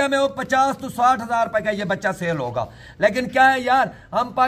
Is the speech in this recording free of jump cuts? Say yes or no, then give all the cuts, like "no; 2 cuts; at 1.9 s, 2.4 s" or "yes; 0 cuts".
yes; 0 cuts